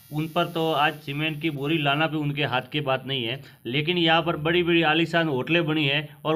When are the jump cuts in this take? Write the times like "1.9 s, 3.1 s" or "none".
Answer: none